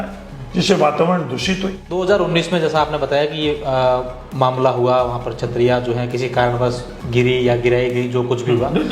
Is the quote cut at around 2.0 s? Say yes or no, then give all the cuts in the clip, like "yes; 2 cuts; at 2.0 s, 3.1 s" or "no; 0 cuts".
yes; 1 cut; at 2.0 s